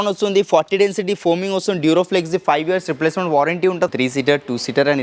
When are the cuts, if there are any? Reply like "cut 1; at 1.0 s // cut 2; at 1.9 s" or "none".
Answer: cut 1; at 3.9 s

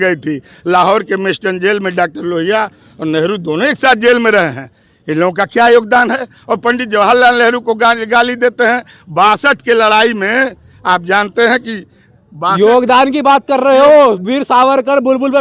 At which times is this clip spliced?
none

